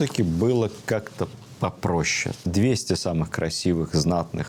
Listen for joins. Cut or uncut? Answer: cut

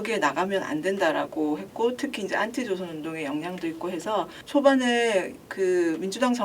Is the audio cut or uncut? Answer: cut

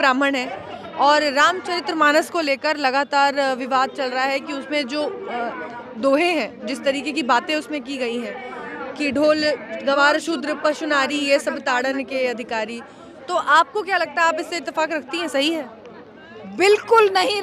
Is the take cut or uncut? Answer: uncut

